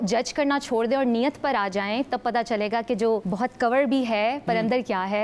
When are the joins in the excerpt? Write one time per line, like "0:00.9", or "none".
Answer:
none